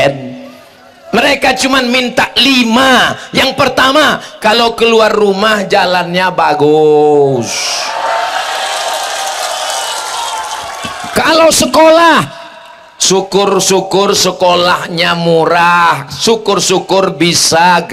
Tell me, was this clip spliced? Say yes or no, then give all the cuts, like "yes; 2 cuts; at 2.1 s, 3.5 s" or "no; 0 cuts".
no; 0 cuts